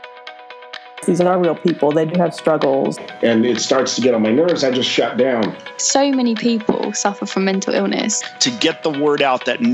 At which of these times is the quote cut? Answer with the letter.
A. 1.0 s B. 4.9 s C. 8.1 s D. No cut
A